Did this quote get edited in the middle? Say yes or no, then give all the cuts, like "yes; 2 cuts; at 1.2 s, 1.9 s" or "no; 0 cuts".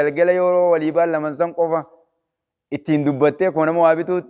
no; 0 cuts